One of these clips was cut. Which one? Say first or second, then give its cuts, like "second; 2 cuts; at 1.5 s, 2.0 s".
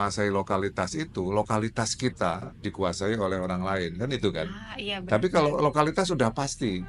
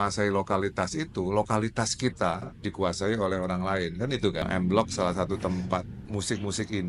second; 2 cuts; at 4.4 s, 6.0 s